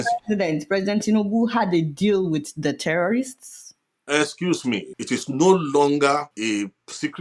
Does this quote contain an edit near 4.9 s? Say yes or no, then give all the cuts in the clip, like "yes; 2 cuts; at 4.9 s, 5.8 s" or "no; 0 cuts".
yes; 2 cuts; at 4.9 s, 6.3 s